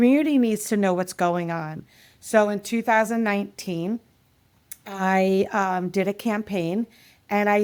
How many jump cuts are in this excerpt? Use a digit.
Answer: 0